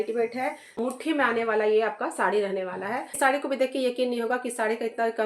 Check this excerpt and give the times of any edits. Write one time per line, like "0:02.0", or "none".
0:00.8
0:03.1